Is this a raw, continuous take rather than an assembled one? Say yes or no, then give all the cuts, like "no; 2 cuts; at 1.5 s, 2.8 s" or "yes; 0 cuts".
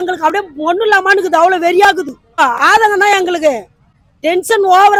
yes; 0 cuts